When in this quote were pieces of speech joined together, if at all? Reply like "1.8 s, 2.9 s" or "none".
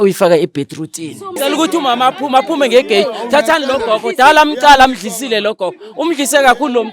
1.3 s

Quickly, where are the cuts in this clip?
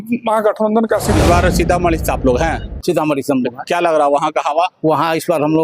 1.2 s

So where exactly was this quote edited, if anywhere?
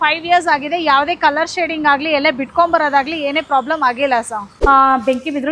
4.4 s

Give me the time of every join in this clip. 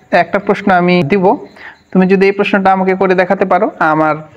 1.1 s

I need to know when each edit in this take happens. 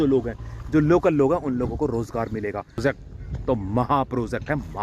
2.8 s

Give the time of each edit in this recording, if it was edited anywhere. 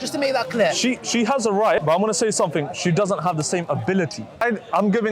1.8 s, 4.4 s

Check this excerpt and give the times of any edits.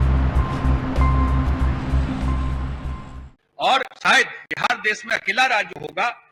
3.0 s

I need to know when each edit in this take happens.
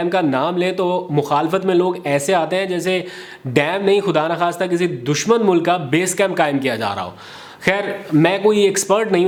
none

